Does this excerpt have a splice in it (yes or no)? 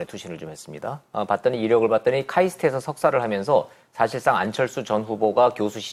no